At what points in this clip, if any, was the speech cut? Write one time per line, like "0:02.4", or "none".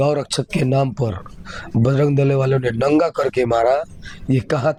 none